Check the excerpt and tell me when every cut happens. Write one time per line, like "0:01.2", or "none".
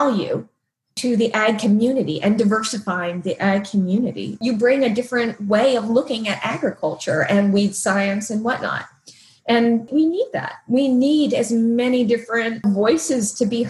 0:01.0
0:04.4
0:09.9
0:12.6